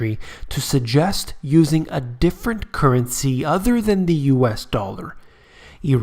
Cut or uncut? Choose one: cut